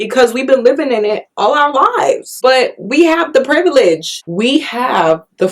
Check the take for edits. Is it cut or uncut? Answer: cut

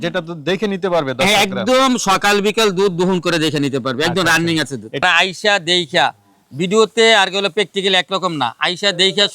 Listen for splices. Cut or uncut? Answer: cut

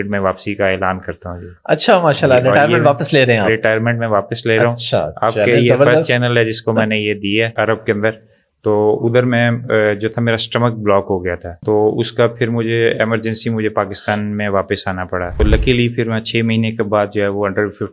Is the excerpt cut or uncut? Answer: cut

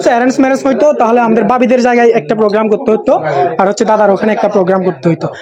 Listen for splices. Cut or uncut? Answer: uncut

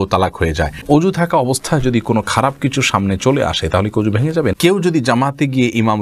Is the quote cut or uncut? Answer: cut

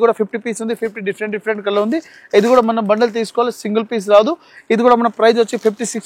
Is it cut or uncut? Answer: uncut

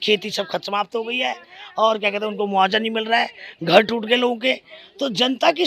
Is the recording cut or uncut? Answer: uncut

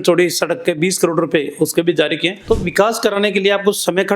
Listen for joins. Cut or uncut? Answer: cut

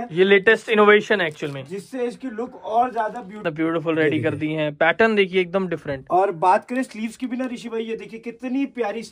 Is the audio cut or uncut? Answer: cut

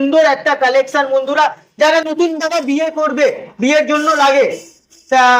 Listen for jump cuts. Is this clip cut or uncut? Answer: uncut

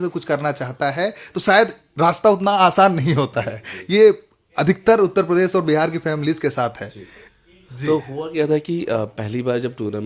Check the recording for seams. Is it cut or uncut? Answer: uncut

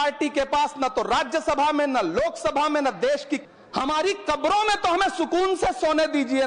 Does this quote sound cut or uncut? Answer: cut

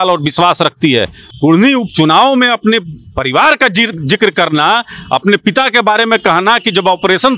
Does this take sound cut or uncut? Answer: cut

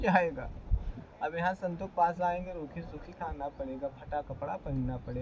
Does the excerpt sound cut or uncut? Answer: uncut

